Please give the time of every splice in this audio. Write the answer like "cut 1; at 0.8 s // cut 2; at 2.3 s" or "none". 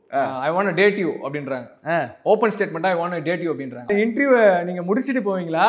cut 1; at 3.8 s